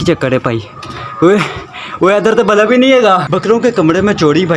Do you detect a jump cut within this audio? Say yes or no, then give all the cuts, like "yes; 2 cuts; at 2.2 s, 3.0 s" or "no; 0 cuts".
yes; 1 cut; at 3.3 s